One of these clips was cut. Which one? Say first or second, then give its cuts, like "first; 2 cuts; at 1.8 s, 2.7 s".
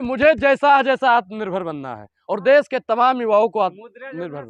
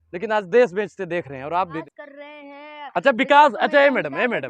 second; 1 cut; at 1.8 s